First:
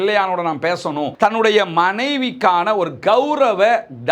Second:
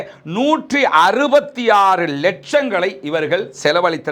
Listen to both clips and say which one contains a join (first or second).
first